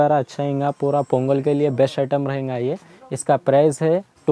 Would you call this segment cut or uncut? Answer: uncut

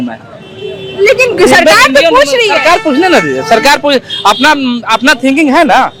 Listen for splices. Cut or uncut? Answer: uncut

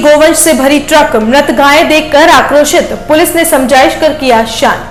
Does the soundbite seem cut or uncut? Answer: uncut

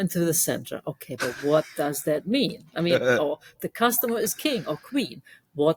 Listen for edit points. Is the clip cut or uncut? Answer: uncut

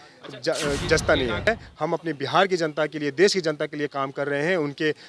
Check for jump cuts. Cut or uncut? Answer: cut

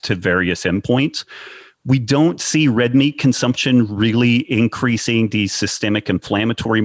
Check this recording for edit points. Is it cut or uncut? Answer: uncut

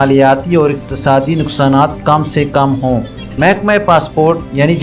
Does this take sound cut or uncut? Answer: uncut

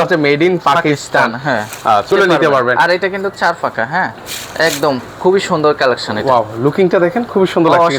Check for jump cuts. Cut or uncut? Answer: cut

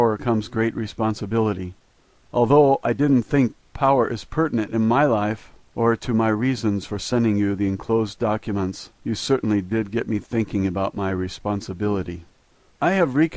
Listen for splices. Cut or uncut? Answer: cut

